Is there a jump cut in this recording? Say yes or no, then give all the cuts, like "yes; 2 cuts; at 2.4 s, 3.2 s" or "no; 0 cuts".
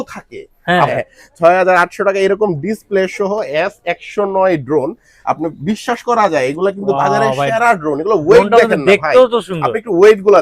yes; 1 cut; at 0.9 s